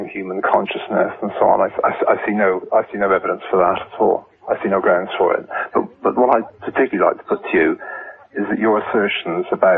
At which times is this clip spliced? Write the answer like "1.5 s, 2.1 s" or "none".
4.0 s